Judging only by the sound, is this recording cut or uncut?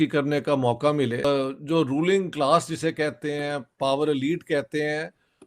cut